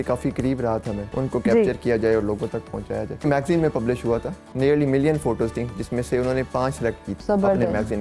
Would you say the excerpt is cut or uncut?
cut